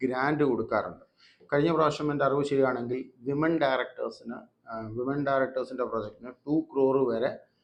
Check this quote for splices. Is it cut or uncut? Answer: uncut